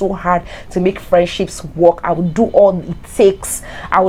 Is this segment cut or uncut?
uncut